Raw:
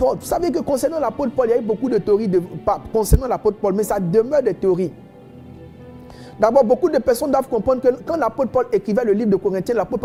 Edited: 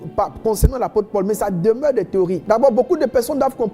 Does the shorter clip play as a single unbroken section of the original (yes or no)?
no